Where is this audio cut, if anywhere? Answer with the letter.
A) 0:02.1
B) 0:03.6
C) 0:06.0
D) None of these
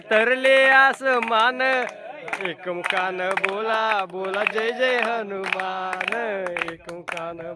D